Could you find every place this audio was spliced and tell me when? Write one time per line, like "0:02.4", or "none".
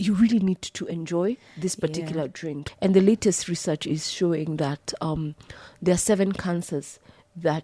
0:02.6